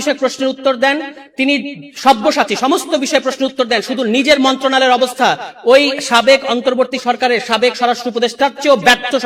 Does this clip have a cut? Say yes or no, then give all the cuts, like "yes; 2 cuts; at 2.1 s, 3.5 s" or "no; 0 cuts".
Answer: no; 0 cuts